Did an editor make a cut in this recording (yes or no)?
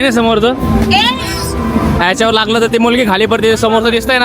no